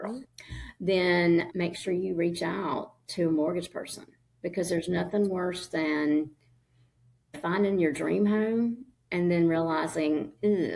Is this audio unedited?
yes; 0 cuts

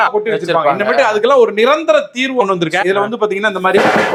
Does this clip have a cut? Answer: no; 0 cuts

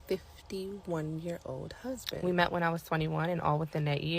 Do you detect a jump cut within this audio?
yes; 1 cut; at 2.4 s

